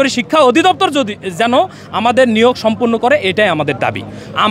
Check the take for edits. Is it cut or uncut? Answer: uncut